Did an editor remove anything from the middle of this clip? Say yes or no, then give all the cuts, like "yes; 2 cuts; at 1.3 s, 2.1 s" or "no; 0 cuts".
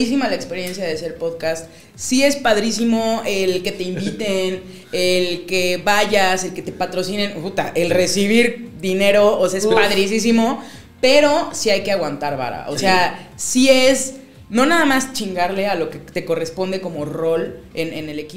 no; 0 cuts